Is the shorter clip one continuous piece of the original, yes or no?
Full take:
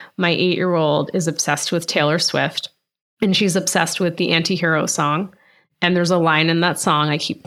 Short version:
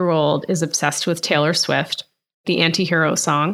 no